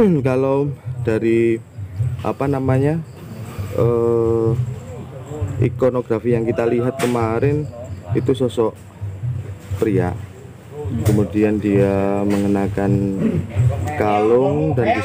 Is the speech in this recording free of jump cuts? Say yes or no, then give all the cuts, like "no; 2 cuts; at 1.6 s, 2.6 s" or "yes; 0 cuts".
yes; 0 cuts